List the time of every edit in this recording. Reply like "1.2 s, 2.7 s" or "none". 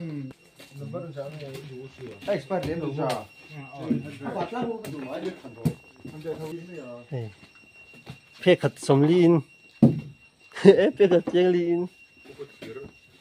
none